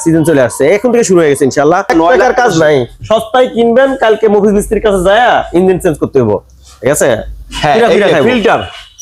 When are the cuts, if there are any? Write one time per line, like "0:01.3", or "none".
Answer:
0:01.9